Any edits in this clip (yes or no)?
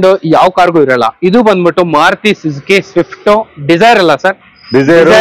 no